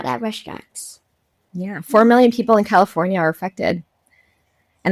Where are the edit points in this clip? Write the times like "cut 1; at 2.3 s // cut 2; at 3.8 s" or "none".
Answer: cut 1; at 1.3 s